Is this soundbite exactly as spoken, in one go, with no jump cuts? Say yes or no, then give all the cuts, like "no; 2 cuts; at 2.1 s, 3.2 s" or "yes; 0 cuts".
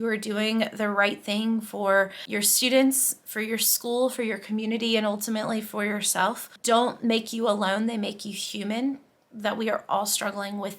no; 2 cuts; at 2.2 s, 6.5 s